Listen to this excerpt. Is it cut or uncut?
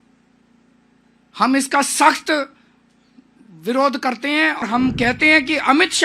cut